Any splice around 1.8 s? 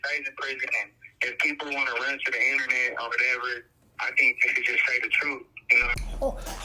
no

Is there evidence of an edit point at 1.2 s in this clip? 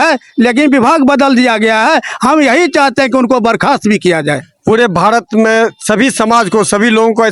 no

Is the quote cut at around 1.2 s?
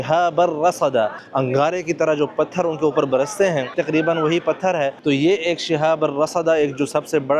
yes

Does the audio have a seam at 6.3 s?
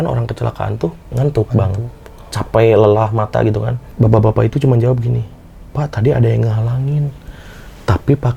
no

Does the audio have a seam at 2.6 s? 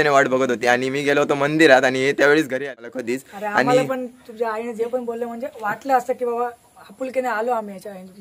yes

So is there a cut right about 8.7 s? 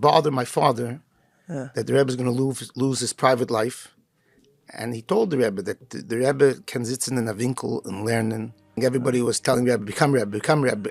yes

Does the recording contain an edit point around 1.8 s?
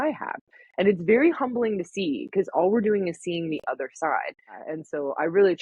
no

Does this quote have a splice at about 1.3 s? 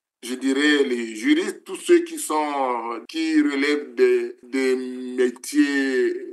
no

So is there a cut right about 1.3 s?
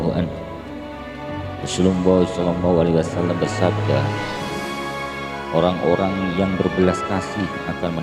no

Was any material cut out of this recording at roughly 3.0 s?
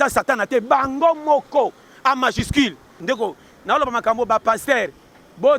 yes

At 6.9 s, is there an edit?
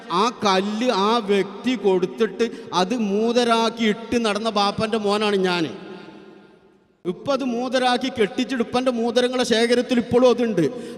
yes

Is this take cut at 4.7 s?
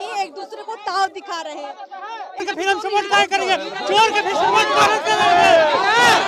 no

